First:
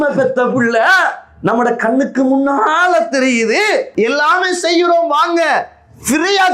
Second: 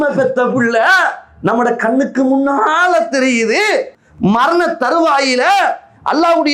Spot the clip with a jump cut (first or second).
first